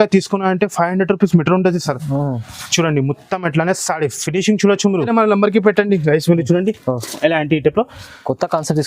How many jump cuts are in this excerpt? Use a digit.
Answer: 1